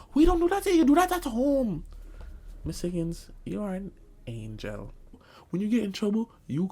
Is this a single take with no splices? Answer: no; 1 cut; at 5.3 s

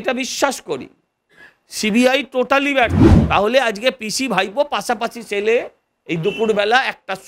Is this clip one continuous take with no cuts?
no; 1 cut; at 3.1 s

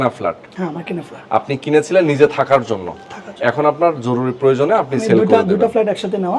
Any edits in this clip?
no; 0 cuts

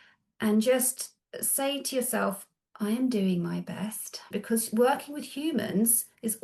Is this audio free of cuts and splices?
no; 1 cut; at 4.3 s

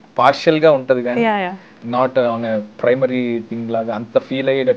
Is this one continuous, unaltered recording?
yes; 0 cuts

